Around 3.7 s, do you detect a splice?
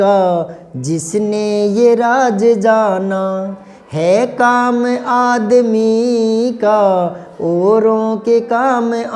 no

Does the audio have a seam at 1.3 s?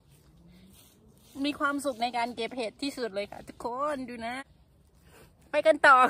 no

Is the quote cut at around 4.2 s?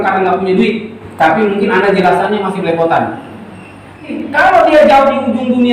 yes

